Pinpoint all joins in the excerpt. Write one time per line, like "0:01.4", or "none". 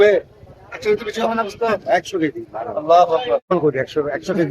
0:03.5